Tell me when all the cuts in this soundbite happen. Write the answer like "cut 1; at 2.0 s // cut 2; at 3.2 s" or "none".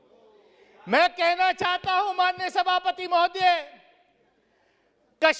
none